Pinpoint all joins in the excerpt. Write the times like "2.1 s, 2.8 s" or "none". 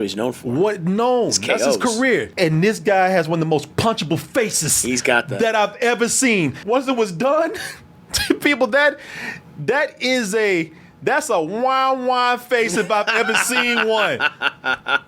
2.3 s, 6.6 s